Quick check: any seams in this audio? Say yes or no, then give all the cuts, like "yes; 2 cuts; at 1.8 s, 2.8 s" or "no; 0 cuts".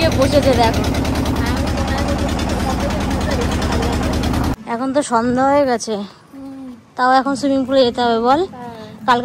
yes; 1 cut; at 4.5 s